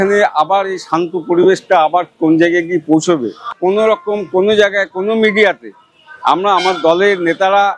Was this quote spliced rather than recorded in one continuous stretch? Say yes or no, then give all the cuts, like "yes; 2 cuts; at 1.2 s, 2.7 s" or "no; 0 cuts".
yes; 1 cut; at 3.5 s